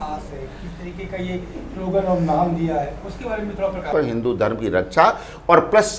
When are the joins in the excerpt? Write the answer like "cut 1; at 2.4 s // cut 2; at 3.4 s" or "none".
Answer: cut 1; at 3.9 s